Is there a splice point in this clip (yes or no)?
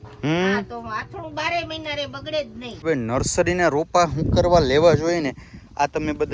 yes